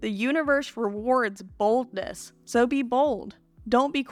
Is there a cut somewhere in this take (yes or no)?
no